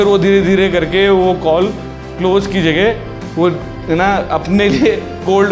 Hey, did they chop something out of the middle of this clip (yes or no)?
no